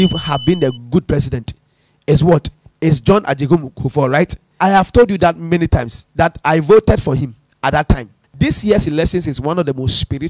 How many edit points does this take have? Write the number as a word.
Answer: one